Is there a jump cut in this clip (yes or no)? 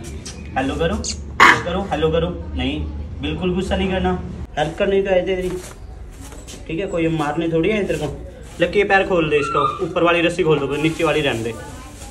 yes